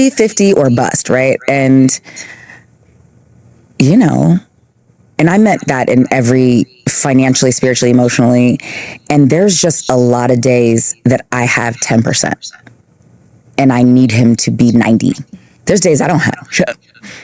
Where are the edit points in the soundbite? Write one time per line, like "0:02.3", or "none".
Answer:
none